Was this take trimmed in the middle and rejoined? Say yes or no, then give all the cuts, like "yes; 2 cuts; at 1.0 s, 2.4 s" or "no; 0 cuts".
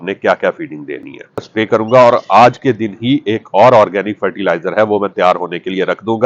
yes; 1 cut; at 1.5 s